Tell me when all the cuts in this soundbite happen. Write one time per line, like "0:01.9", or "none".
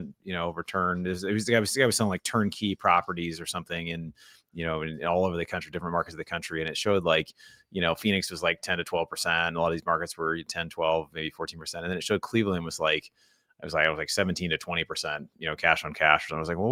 none